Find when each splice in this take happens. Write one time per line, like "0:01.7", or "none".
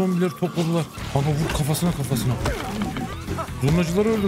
0:01.0
0:03.2